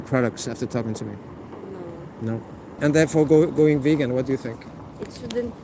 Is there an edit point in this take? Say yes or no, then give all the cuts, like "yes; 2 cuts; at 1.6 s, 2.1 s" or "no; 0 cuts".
yes; 1 cut; at 2.7 s